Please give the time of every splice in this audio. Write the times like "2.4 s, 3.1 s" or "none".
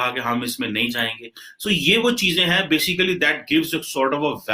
none